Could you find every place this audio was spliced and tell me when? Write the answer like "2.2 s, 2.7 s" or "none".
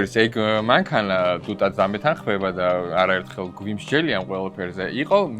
none